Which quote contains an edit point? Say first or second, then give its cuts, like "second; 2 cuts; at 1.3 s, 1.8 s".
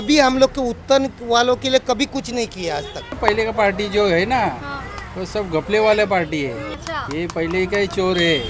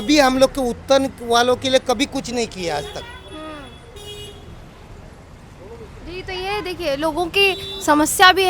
first; 2 cuts; at 3.1 s, 6.7 s